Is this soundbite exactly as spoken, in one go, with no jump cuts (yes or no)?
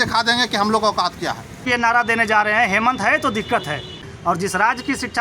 no